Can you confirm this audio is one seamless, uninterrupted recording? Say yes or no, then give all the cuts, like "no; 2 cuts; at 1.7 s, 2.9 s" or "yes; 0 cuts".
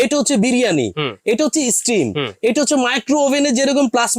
yes; 0 cuts